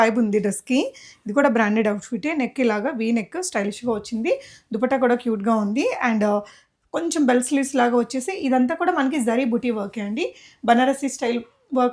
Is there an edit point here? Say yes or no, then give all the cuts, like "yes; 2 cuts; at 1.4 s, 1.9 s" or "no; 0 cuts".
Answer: no; 0 cuts